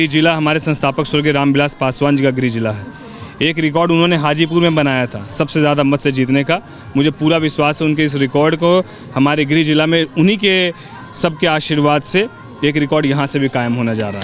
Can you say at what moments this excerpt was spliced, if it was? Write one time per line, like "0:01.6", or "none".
none